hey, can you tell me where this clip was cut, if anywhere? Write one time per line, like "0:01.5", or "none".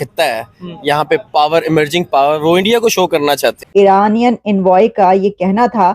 0:03.6